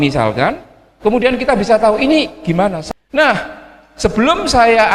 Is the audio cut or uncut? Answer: cut